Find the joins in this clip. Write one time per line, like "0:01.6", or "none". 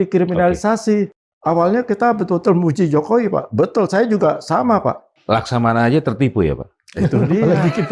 0:01.2
0:05.1